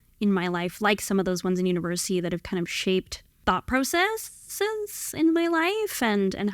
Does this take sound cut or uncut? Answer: cut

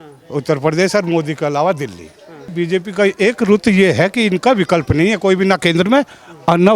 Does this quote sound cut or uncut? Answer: cut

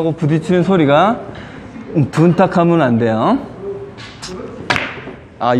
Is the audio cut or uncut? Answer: uncut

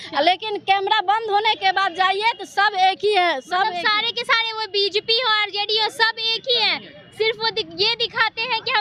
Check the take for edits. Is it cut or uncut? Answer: uncut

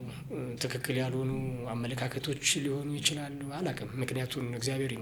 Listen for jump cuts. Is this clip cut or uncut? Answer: uncut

